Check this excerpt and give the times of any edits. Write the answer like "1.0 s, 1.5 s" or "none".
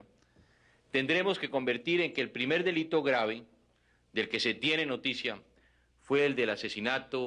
3.5 s